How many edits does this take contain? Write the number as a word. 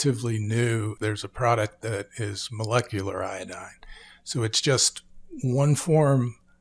one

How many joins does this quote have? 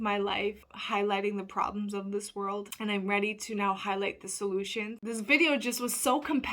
one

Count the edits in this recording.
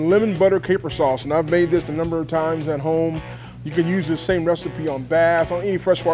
zero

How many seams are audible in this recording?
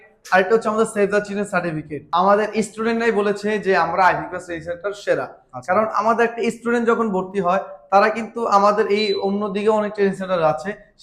one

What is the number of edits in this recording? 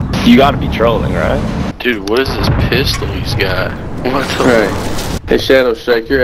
two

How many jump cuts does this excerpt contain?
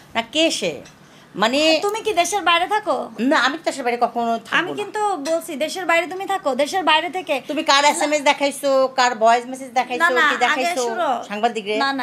zero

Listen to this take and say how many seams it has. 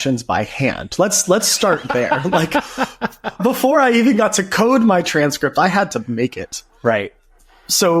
one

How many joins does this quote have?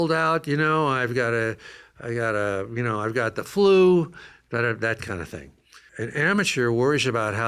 one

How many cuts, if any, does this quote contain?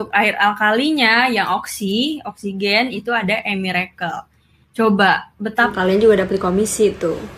one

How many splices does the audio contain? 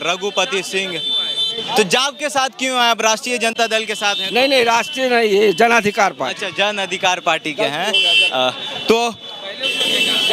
zero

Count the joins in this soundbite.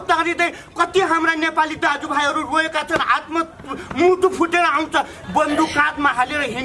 one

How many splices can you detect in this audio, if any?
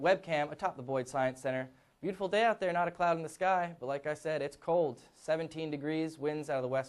zero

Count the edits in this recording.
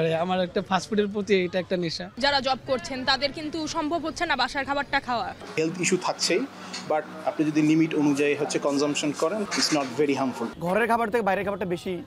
five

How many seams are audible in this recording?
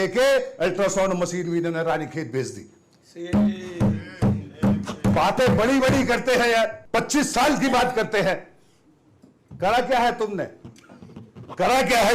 one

